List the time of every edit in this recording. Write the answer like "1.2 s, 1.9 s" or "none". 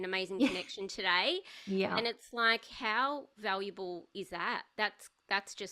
none